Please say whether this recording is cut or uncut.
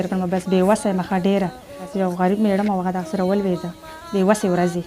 cut